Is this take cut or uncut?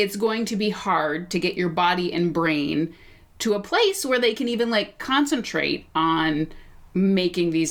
uncut